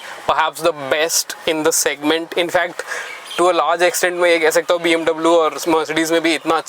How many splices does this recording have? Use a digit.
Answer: 0